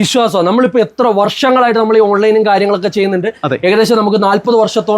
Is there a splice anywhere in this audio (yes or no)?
no